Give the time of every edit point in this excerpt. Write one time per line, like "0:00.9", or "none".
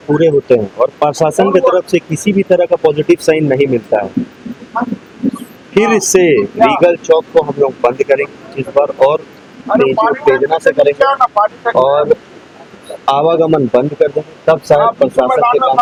none